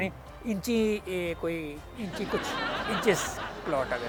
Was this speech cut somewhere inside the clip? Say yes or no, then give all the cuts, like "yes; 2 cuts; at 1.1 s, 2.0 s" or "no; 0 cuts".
no; 0 cuts